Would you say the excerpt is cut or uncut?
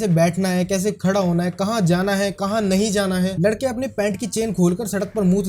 cut